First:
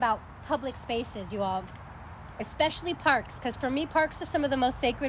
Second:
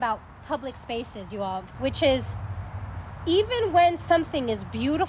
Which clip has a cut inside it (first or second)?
second